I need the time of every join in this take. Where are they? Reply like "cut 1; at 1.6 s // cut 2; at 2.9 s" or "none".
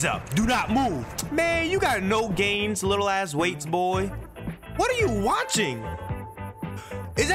cut 1; at 1.1 s